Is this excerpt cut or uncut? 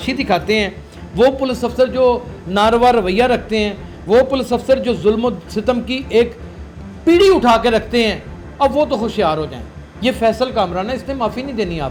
uncut